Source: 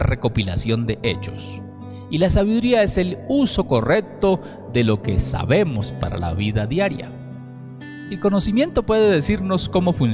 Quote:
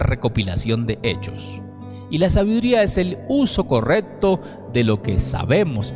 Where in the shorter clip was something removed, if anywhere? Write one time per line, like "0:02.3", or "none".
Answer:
none